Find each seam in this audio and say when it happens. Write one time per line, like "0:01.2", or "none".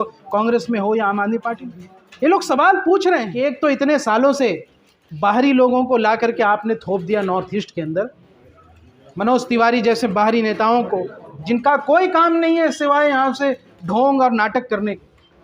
0:03.3

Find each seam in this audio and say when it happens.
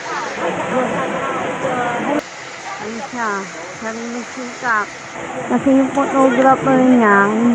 0:02.2

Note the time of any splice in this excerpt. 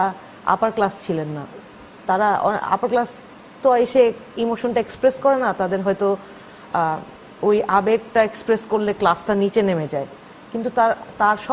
none

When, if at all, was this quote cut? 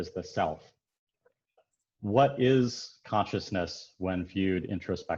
0:01.6

